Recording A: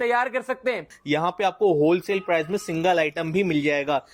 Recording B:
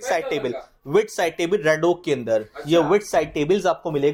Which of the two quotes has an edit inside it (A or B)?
A